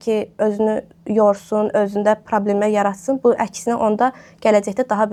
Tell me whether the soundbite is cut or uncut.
uncut